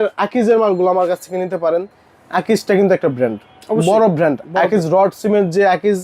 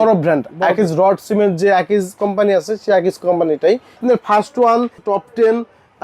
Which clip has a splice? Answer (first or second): second